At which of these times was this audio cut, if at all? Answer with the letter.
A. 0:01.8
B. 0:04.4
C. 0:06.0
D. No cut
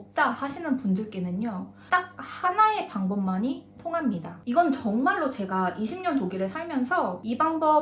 A